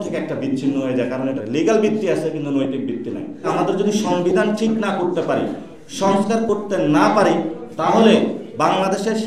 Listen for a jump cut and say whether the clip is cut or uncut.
cut